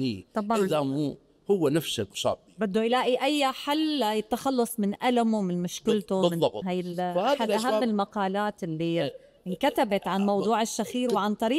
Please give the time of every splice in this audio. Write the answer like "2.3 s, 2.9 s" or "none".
6.6 s